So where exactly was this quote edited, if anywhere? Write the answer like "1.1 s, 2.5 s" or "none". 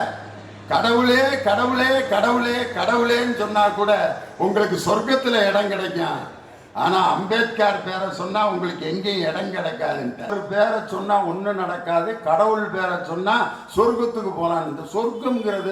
10.3 s